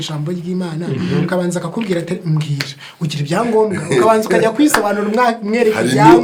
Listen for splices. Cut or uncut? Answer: uncut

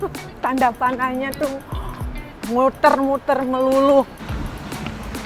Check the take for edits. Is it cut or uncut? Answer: cut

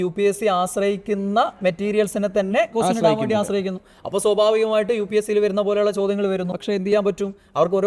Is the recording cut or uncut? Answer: cut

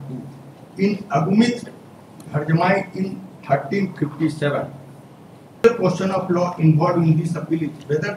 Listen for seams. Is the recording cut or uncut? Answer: cut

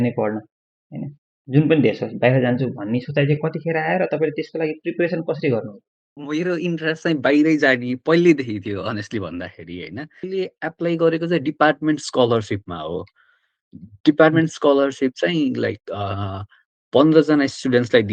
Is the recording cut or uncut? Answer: cut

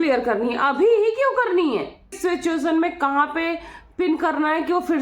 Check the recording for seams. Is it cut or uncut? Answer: cut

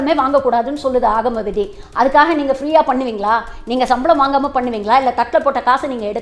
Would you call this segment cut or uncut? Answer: uncut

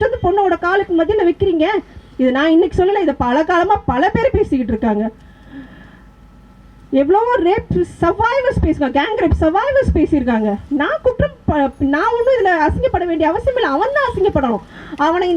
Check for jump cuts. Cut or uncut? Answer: uncut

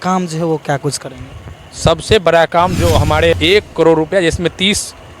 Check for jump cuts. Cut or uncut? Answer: cut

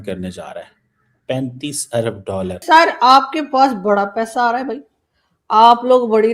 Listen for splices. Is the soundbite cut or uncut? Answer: cut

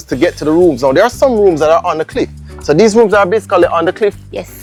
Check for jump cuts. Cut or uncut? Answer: uncut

